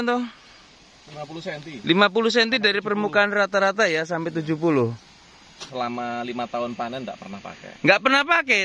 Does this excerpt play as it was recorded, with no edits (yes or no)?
no